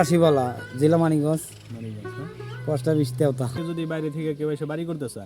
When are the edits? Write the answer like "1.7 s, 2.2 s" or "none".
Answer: 3.6 s